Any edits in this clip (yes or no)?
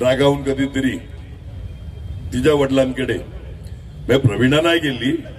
no